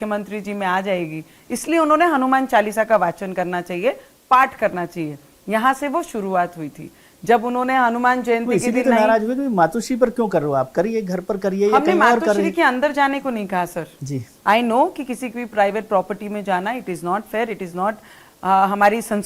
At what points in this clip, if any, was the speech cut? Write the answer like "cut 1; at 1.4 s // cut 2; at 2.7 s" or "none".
none